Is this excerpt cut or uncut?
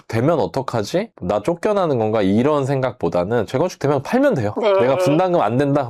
uncut